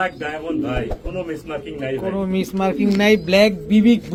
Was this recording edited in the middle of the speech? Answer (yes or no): no